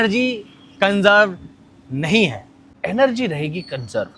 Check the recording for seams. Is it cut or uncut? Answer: cut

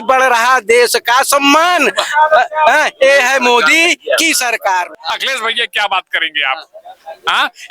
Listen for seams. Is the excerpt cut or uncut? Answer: cut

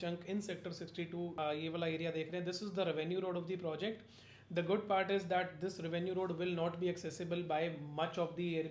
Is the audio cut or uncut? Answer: cut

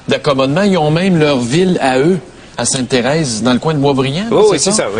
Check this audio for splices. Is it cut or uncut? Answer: cut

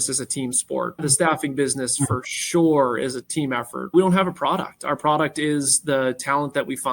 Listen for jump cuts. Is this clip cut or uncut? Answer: cut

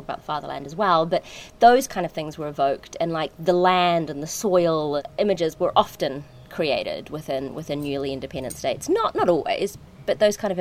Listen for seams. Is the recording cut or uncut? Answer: cut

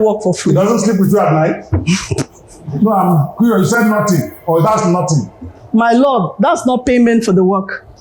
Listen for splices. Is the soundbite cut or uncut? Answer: cut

